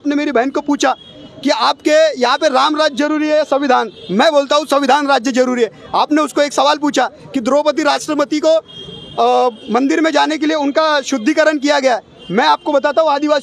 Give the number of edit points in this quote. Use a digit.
0